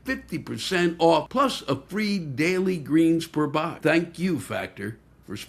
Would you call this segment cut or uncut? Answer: cut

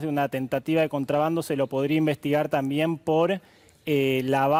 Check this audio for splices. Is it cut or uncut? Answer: uncut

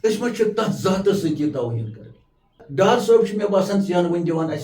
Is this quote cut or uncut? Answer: cut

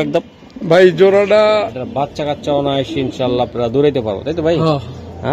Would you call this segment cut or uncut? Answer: cut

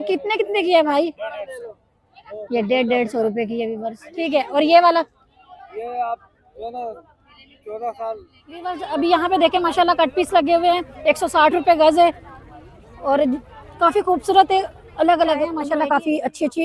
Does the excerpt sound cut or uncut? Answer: cut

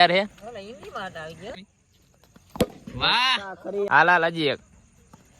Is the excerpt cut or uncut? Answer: cut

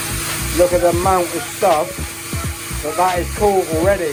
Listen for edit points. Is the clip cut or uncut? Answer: uncut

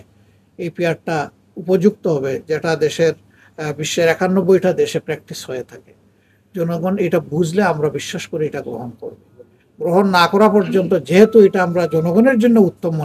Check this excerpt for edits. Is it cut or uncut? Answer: uncut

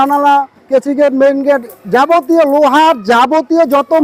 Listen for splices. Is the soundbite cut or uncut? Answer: uncut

